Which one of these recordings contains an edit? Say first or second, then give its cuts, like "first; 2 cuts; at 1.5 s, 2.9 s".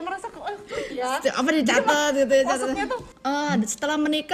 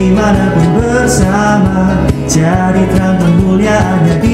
first; 1 cut; at 3.1 s